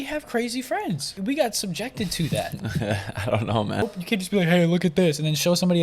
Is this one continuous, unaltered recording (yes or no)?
no